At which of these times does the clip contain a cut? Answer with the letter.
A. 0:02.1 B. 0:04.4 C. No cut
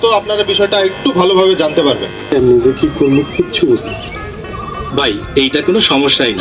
A